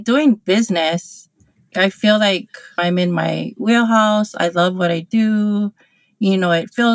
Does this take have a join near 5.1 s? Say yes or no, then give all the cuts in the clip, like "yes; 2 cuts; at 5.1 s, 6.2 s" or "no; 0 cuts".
no; 2 cuts; at 1.7 s, 2.8 s